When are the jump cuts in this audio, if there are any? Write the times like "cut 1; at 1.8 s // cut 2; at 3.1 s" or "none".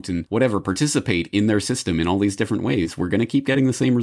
none